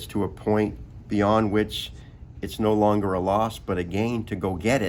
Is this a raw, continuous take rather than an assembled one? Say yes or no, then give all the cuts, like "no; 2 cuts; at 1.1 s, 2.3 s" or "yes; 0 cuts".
yes; 0 cuts